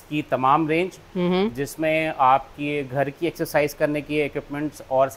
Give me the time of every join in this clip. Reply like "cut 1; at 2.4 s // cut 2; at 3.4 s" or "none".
none